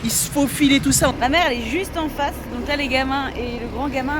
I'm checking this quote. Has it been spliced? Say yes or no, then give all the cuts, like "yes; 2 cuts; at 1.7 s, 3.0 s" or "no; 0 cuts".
yes; 1 cut; at 1.1 s